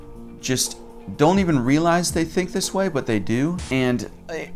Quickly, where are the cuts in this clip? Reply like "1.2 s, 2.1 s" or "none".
3.6 s